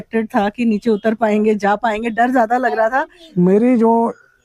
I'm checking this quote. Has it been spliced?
yes; 1 cut; at 3.2 s

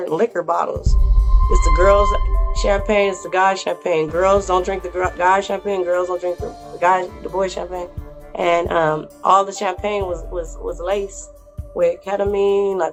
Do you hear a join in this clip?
no; 0 cuts

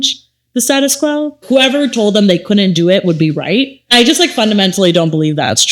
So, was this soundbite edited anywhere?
yes; 2 cuts; at 1.4 s, 3.9 s

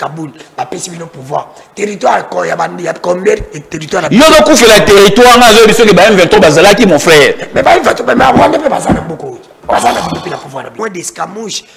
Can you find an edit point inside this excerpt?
yes; 1 cut; at 10.6 s

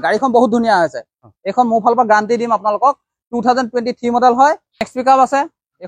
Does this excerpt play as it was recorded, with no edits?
no; 1 cut; at 4.9 s

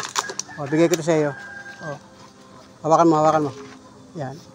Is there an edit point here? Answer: no; 0 cuts

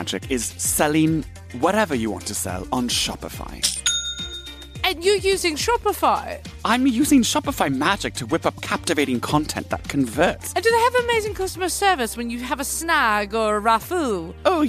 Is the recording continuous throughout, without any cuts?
no; 2 cuts; at 4.6 s, 10.4 s

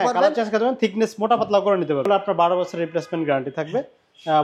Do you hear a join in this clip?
yes; 1 cut; at 2.0 s

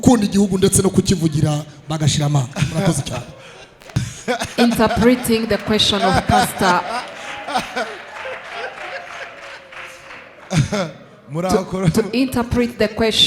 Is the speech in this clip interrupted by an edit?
no; 0 cuts

